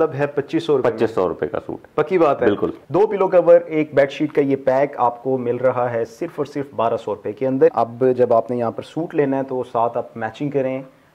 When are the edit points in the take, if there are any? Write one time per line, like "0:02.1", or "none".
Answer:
0:02.8
0:07.7